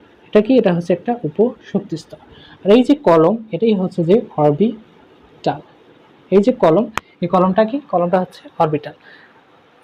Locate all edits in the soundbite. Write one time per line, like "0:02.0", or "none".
none